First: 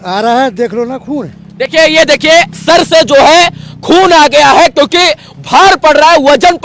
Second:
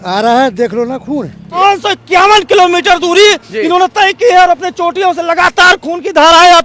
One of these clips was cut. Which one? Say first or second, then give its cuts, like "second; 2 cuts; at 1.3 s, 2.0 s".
second; 1 cut; at 1.6 s